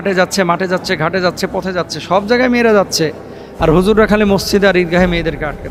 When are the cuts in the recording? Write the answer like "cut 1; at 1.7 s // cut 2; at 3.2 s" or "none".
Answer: none